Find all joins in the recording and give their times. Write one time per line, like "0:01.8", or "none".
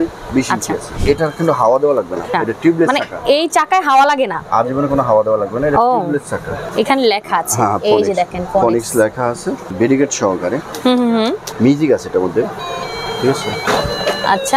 0:00.9
0:02.3
0:06.6
0:09.7
0:11.4